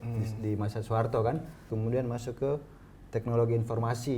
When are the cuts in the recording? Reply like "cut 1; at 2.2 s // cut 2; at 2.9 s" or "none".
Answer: cut 1; at 1.7 s